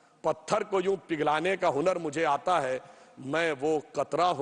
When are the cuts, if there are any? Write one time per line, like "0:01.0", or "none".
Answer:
none